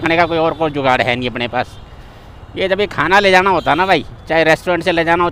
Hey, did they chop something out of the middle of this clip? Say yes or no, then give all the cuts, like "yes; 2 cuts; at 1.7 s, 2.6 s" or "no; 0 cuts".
no; 0 cuts